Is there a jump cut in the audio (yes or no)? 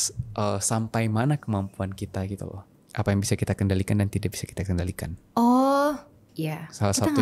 no